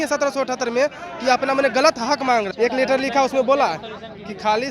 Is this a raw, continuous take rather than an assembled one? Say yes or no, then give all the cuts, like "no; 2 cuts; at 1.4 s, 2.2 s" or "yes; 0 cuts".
no; 1 cut; at 2.5 s